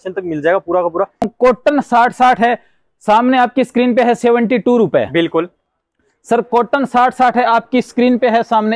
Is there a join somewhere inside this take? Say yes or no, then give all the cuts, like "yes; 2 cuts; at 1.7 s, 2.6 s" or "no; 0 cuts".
yes; 1 cut; at 1.3 s